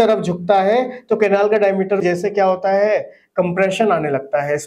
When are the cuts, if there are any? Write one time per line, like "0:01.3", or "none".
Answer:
0:02.0